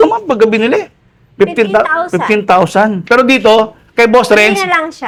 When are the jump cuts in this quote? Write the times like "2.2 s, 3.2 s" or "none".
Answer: none